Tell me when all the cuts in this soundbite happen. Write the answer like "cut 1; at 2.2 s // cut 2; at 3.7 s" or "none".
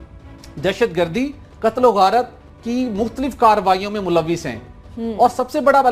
cut 1; at 2.7 s